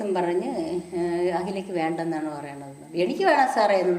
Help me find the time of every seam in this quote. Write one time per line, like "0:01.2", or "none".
none